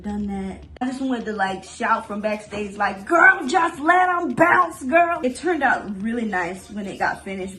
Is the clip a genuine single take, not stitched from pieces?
no; 2 cuts; at 0.8 s, 5.2 s

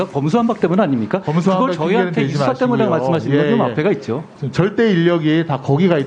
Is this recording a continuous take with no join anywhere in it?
yes; 0 cuts

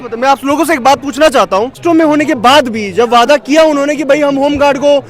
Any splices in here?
yes; 1 cut; at 1.8 s

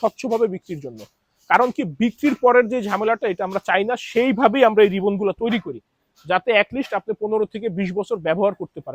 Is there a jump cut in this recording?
no; 0 cuts

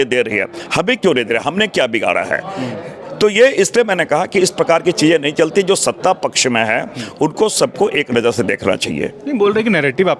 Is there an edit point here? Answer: no; 0 cuts

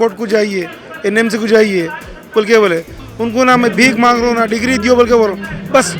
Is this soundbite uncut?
no; 1 cut; at 3.0 s

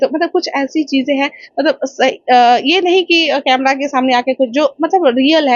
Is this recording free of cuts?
yes; 0 cuts

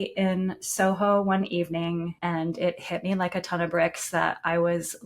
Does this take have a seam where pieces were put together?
yes; 1 cut; at 2.1 s

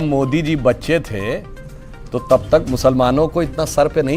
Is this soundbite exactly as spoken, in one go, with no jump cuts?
yes; 0 cuts

